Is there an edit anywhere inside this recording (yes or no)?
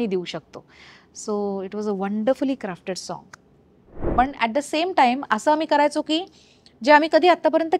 yes